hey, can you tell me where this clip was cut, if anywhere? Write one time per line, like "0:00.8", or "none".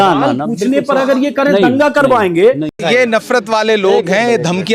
0:02.7